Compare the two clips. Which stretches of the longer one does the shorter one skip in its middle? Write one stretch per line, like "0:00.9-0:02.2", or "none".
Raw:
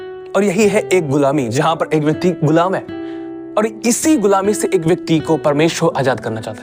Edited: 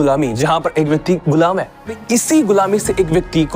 0:03.1-0:03.7